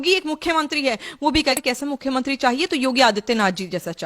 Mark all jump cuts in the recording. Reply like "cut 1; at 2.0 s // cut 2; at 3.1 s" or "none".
cut 1; at 1.5 s